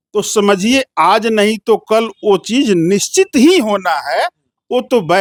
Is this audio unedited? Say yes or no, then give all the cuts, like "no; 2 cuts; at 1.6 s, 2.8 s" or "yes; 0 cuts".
yes; 0 cuts